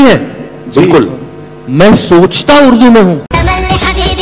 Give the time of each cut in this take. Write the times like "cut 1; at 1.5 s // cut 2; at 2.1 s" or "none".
cut 1; at 3.3 s